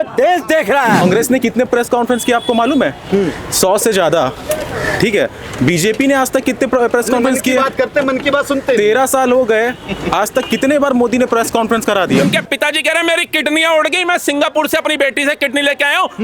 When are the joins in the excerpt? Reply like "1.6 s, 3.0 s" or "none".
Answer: 1.0 s, 12.2 s

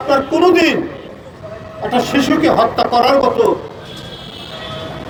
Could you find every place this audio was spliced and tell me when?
none

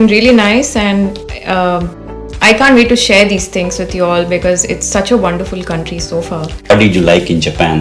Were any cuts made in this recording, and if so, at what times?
6.7 s

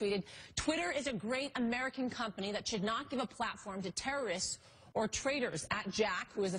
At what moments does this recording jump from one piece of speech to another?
3.3 s

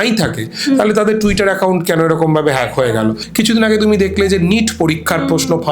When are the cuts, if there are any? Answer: 3.2 s

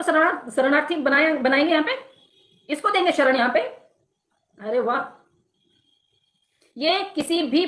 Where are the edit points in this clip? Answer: none

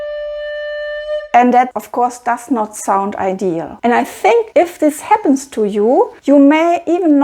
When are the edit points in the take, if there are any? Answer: 3.7 s, 4.5 s, 6.2 s

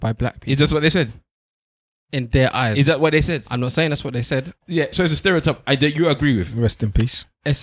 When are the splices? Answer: 4.6 s

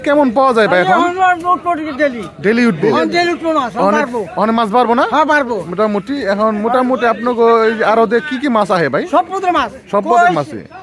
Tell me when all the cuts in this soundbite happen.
none

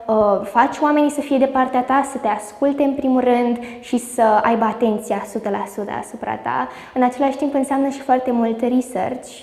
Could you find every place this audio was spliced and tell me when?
none

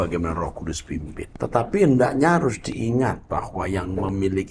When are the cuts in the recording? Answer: 1.2 s

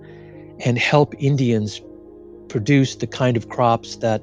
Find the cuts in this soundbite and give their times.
none

